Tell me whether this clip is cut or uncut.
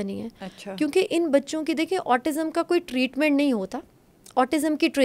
uncut